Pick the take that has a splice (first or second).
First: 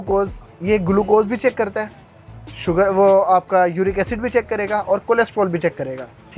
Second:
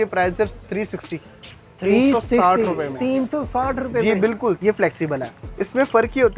second